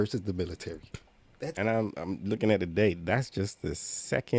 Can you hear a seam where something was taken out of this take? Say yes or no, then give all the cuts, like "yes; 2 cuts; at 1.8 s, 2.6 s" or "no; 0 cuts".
yes; 1 cut; at 1.5 s